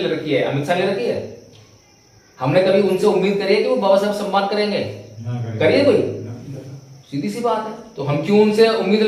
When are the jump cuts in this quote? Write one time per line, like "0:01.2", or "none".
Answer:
none

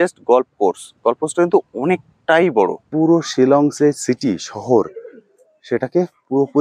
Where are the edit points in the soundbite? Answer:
0:02.8

